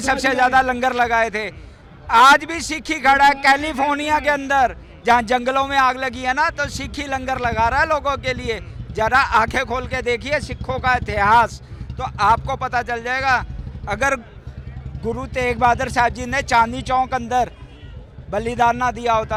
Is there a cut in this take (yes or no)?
no